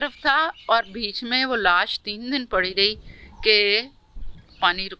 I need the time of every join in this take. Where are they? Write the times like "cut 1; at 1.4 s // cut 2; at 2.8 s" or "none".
none